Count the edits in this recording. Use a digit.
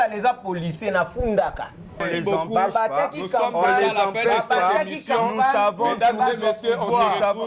1